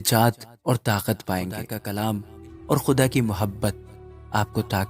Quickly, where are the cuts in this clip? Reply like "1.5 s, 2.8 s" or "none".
1.8 s